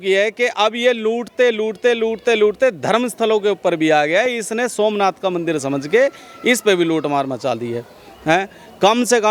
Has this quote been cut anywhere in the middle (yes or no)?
no